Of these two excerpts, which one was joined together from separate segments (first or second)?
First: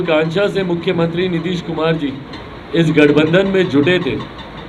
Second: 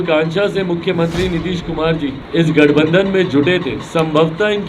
second